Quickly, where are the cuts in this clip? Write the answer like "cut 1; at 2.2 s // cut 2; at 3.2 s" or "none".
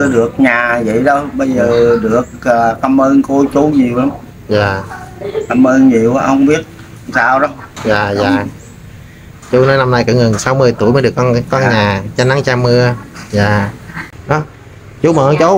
cut 1; at 14.0 s